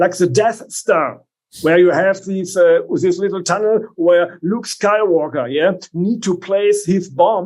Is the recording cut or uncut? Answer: uncut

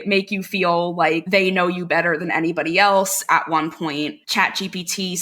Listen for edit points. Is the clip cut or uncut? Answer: cut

